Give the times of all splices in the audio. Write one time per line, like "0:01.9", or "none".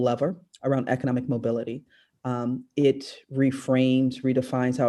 none